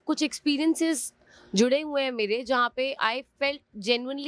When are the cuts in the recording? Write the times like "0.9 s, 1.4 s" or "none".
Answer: none